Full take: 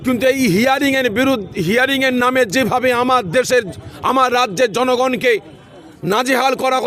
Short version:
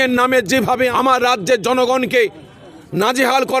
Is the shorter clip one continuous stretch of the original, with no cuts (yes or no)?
no